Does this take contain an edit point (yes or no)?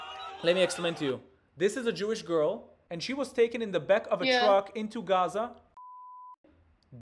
no